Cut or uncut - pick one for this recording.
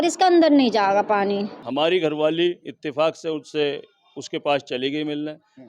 cut